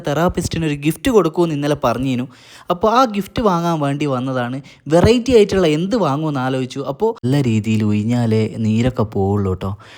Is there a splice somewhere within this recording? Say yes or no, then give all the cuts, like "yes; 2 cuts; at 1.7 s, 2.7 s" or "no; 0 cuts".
yes; 1 cut; at 7.2 s